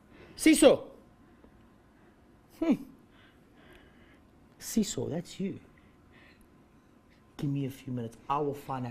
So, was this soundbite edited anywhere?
yes; 1 cut; at 5.0 s

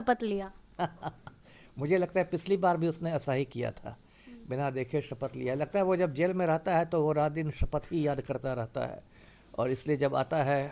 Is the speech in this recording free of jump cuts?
yes; 0 cuts

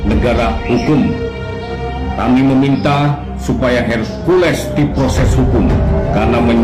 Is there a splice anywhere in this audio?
no; 0 cuts

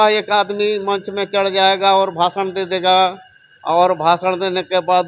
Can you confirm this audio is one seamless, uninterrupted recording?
yes; 0 cuts

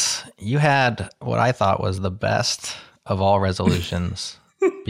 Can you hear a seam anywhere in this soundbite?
no; 0 cuts

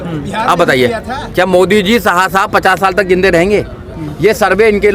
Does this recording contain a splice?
no; 0 cuts

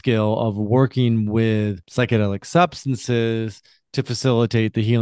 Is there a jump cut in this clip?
yes; 1 cut; at 1.8 s

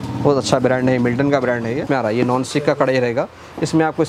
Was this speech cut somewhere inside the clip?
yes; 1 cut; at 1.8 s

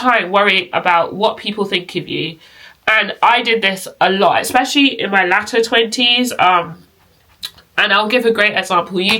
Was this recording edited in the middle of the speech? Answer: no; 0 cuts

